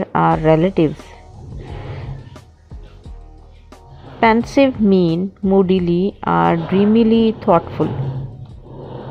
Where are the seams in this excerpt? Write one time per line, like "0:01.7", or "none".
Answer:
none